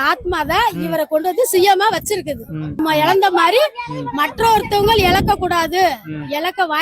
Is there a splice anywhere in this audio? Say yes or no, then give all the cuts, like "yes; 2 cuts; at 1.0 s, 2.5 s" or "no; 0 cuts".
yes; 1 cut; at 2.7 s